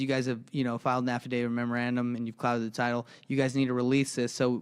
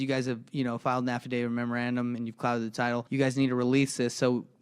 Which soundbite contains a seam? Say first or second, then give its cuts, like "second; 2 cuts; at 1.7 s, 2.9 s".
second; 1 cut; at 3.1 s